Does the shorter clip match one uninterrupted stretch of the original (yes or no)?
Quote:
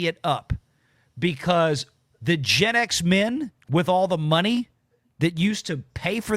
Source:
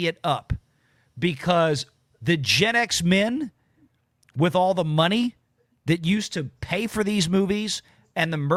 no